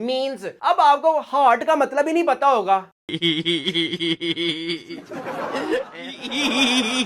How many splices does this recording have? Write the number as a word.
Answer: zero